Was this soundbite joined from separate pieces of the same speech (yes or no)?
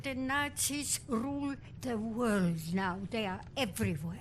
no